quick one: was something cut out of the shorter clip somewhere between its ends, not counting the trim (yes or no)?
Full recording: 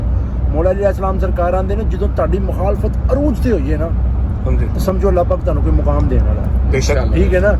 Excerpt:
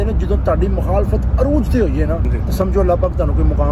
yes